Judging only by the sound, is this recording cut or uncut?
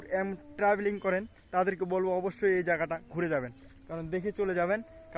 uncut